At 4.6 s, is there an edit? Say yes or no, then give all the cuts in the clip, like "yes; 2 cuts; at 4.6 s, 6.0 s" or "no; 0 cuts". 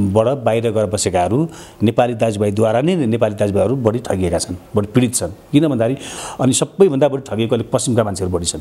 no; 1 cut; at 6.1 s